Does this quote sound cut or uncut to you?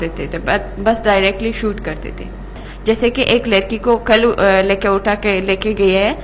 cut